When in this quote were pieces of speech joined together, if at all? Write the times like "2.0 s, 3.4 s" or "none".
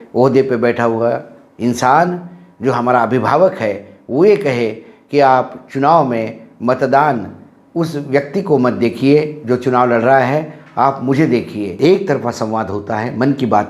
11.7 s